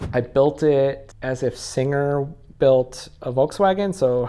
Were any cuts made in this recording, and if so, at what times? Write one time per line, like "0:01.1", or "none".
0:01.1